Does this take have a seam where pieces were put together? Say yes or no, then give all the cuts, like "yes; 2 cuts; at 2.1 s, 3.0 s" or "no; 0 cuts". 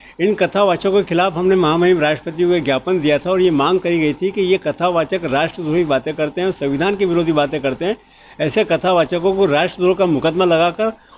no; 0 cuts